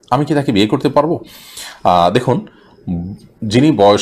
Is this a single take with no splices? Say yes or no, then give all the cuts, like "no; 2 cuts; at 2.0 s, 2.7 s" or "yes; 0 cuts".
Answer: yes; 0 cuts